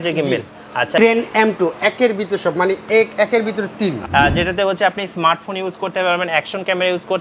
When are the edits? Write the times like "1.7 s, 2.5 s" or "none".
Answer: 1.0 s, 4.0 s